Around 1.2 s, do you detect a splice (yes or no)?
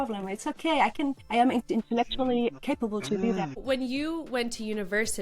yes